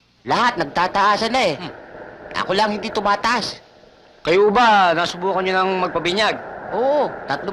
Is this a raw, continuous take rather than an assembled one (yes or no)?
yes